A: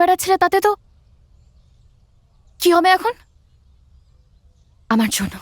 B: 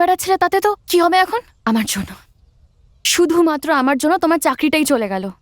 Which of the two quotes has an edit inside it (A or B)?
B